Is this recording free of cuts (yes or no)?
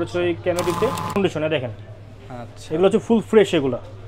no